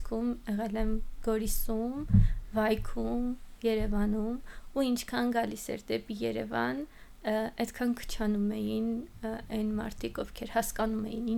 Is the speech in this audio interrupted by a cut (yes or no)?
no